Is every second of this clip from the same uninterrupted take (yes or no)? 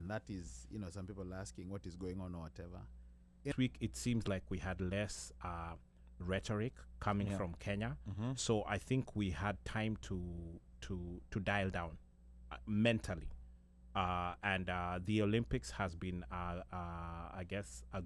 no